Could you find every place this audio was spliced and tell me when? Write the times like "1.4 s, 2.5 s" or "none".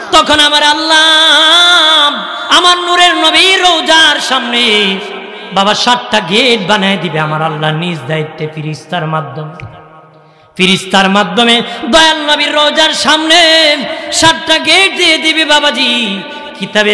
none